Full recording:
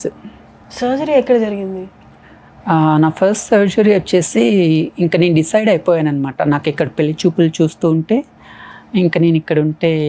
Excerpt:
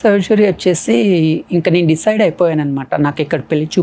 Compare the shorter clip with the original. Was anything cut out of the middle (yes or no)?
no